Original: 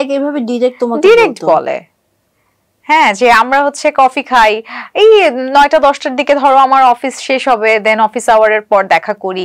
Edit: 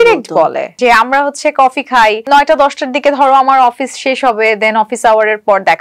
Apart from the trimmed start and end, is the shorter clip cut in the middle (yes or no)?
yes